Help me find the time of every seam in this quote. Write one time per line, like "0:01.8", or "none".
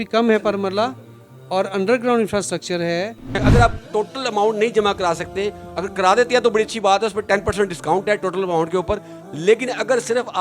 0:03.4